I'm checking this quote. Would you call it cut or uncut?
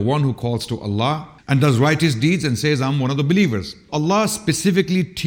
cut